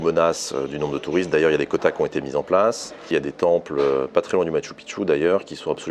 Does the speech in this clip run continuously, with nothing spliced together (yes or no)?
no